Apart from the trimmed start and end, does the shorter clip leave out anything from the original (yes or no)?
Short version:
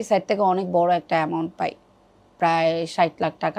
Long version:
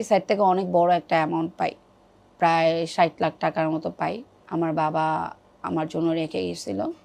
no